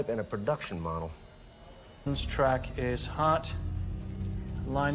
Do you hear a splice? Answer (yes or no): no